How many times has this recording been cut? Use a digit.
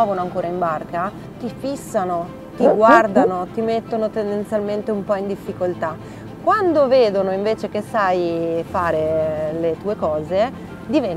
0